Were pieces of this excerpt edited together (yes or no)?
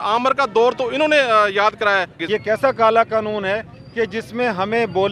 yes